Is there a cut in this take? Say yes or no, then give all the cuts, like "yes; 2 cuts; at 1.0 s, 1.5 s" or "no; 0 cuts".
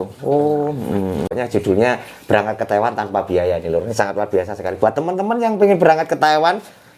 yes; 1 cut; at 1.3 s